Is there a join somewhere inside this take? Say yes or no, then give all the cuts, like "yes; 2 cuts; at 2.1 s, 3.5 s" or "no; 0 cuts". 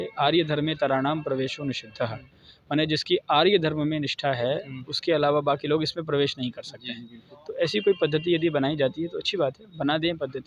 no; 0 cuts